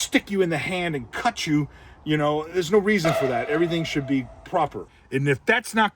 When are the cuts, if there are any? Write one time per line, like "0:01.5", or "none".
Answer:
0:04.9